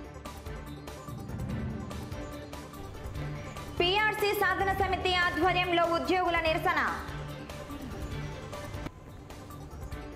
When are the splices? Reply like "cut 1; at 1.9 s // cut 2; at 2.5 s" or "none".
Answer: cut 1; at 1.5 s